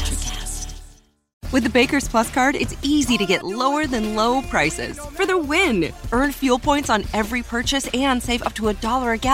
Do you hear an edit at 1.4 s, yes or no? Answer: yes